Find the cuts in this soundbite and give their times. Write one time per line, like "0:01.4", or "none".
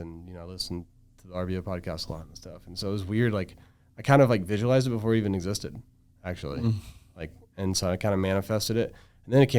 none